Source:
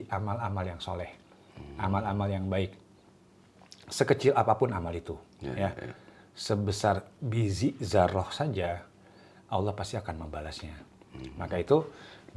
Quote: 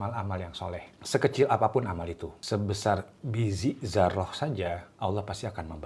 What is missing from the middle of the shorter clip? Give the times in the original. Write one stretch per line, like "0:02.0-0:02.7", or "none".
0:01.2-0:03.8
0:05.2-0:06.3
0:08.9-0:09.4